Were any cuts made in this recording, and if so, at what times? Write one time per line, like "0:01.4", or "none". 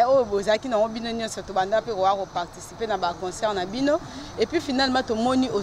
none